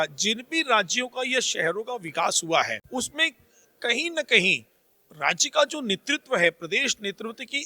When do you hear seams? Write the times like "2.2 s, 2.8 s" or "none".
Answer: 2.8 s